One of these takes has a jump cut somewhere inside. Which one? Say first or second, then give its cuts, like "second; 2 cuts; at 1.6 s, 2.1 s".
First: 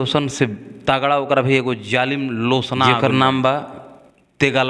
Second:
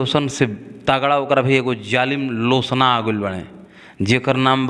first; 1 cut; at 3.0 s